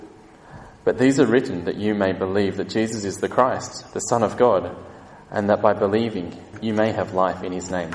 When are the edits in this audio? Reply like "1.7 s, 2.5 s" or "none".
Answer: 6.5 s

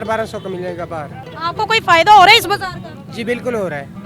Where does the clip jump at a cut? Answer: none

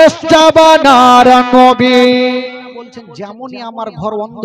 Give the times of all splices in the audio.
3.0 s

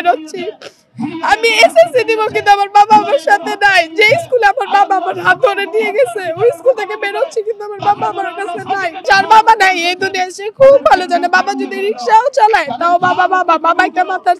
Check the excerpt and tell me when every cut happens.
8.9 s

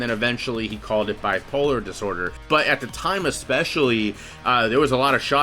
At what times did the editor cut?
2.4 s

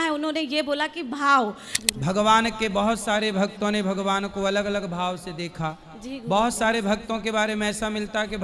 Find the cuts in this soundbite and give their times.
1.7 s

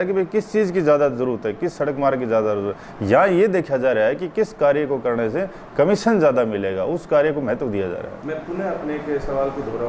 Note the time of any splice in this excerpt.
none

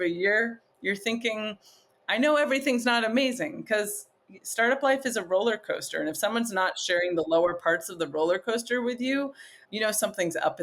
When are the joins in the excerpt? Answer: 9.6 s

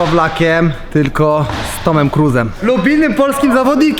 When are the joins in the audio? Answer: 0.8 s, 2.5 s

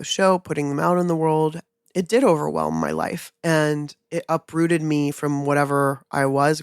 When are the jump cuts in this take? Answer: 1.7 s

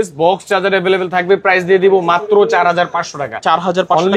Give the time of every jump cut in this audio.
none

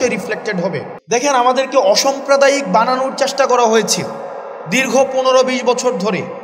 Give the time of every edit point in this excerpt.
0.9 s

